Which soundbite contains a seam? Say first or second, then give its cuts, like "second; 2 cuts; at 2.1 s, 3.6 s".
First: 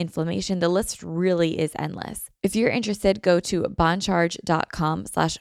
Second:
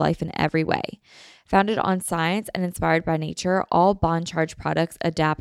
first; 1 cut; at 2.2 s